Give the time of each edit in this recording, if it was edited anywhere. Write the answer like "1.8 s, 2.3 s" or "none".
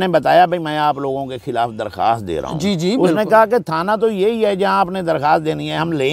none

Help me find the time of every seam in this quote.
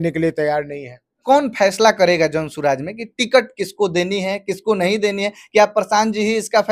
1.2 s

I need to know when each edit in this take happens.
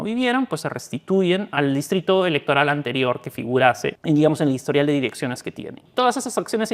1.5 s, 4.0 s, 5.8 s

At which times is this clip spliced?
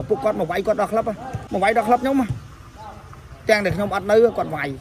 1.3 s

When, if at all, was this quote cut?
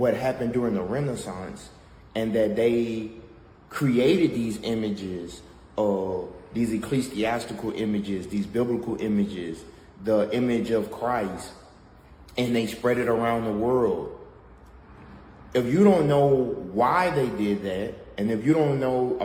none

